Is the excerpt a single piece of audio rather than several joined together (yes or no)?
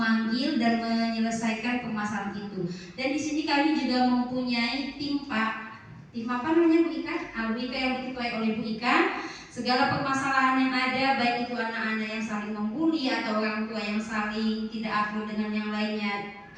yes